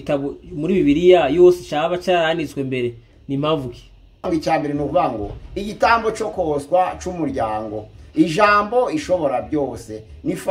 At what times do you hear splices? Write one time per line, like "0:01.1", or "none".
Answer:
0:04.2

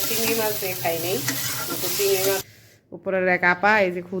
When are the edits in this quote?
0:02.5

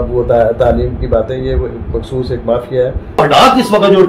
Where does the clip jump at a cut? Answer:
0:03.2

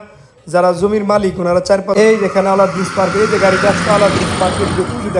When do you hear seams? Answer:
0:01.9

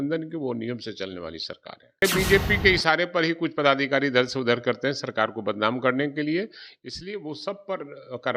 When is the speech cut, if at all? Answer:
0:02.0

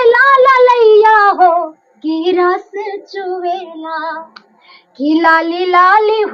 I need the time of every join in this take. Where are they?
none

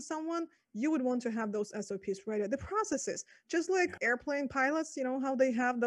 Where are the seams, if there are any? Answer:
0:04.0

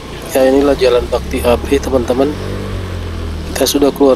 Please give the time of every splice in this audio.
none

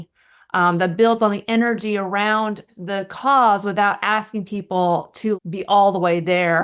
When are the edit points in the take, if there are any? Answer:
0:02.7
0:05.4

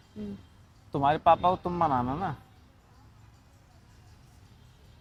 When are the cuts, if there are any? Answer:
none

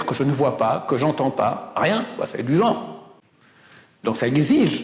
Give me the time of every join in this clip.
none

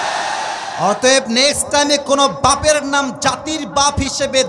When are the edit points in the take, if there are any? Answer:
none

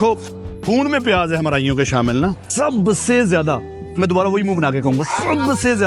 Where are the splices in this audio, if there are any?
0:02.4

